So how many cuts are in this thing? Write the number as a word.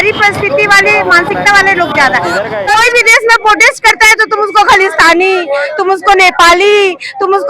one